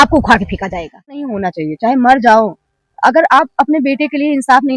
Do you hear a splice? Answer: yes; 1 cut; at 1.4 s

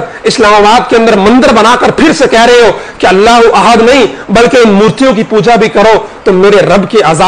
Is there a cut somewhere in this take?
no; 0 cuts

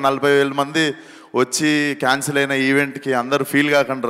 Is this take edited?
no; 0 cuts

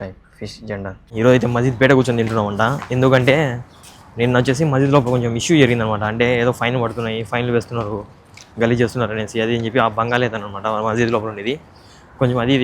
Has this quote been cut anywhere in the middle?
yes; 1 cut; at 1.1 s

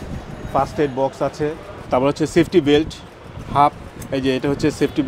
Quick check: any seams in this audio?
yes; 1 cut; at 1.7 s

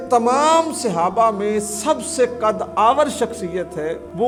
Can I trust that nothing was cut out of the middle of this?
yes; 0 cuts

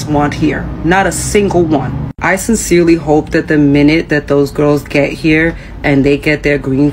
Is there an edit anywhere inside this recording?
no; 0 cuts

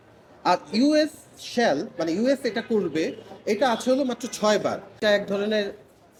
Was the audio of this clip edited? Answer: no; 0 cuts

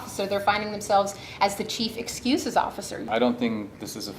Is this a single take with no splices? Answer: no; 1 cut; at 3.0 s

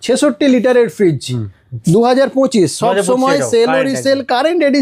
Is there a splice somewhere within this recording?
no; 0 cuts

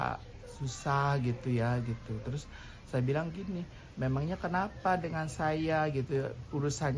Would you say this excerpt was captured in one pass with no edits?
yes; 0 cuts

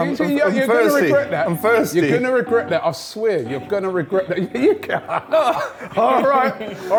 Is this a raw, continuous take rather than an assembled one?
yes; 0 cuts

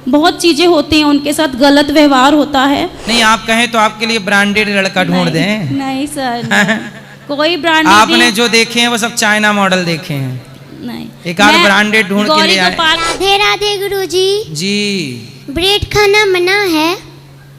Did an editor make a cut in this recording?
yes; 2 cuts; at 3.0 s, 12.9 s

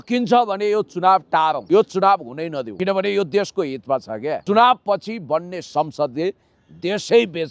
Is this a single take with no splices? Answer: no; 3 cuts; at 1.6 s, 2.7 s, 4.4 s

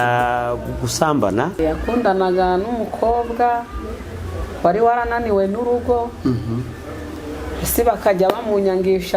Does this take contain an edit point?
yes; 1 cut; at 1.6 s

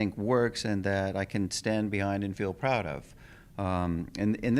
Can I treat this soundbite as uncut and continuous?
yes; 0 cuts

